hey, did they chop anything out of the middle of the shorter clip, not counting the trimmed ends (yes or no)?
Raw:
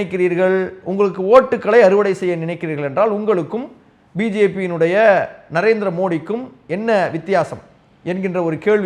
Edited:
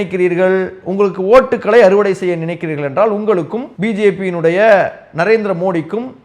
yes